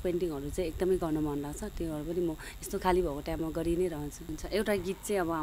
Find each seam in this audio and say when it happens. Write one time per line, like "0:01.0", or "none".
0:04.4